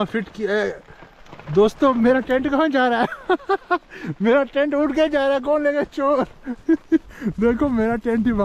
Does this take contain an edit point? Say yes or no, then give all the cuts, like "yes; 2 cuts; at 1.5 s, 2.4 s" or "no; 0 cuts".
no; 0 cuts